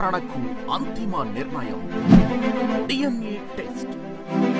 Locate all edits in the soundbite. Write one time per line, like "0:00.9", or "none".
none

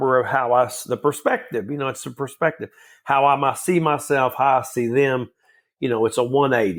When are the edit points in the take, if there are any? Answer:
none

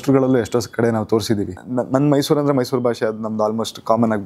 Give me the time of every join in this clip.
0:01.6

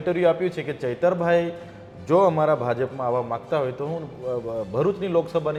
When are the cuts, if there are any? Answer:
none

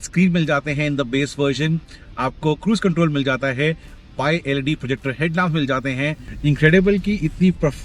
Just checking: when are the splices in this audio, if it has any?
0:06.3

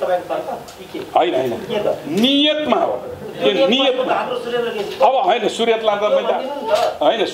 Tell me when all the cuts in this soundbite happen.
none

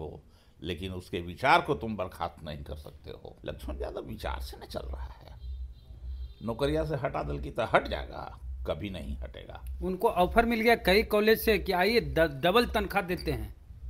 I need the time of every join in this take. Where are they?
0:03.3

